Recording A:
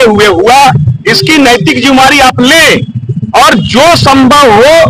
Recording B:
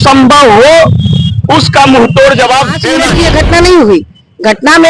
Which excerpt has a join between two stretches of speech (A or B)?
B